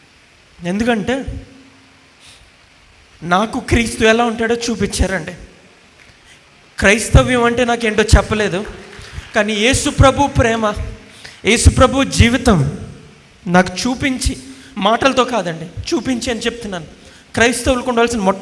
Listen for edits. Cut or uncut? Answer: uncut